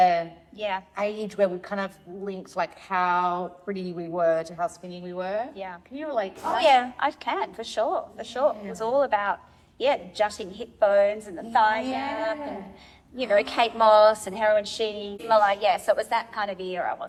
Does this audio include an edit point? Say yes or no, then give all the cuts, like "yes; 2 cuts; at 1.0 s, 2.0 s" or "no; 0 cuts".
no; 0 cuts